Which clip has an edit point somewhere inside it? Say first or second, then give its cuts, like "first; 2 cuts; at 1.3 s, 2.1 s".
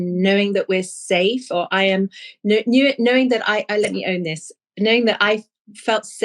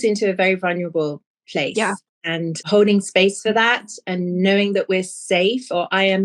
second; 1 cut; at 2.7 s